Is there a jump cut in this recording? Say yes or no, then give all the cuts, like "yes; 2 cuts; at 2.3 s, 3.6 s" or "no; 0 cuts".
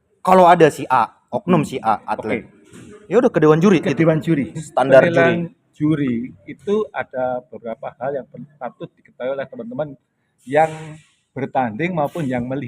yes; 1 cut; at 4.6 s